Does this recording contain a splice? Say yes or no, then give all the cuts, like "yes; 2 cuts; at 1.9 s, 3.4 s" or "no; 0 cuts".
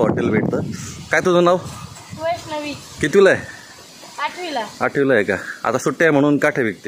no; 0 cuts